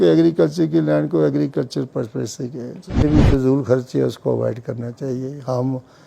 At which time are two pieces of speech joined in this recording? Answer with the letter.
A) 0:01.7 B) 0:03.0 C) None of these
B